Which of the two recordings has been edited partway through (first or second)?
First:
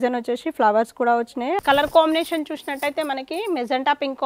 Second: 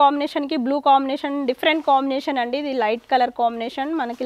first